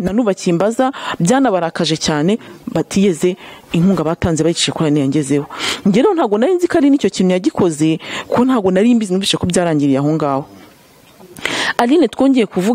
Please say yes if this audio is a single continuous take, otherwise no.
yes